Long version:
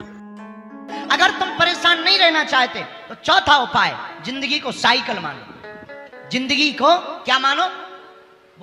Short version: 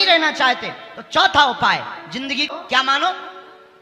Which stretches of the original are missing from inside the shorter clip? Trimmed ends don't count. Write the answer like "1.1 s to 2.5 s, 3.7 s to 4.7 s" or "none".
4.6 s to 7.0 s